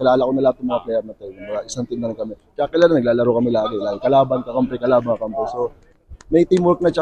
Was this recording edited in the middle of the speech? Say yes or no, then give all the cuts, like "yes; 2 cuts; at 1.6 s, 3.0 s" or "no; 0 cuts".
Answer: no; 0 cuts